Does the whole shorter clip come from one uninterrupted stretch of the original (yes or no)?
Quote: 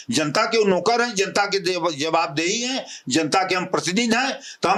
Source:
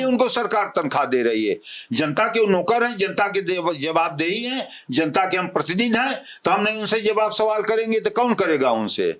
yes